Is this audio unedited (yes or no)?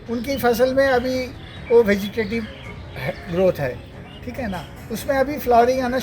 yes